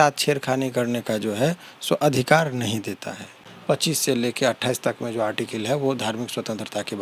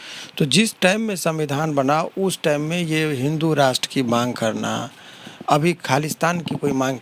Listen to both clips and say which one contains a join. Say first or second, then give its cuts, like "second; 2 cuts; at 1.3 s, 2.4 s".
first; 1 cut; at 3.5 s